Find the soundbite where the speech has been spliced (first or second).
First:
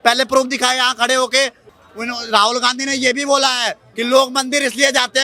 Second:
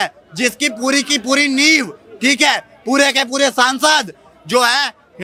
first